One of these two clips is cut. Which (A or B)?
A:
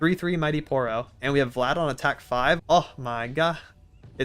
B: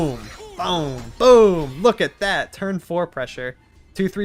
A